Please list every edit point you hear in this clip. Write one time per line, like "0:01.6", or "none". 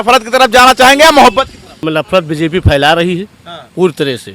0:01.8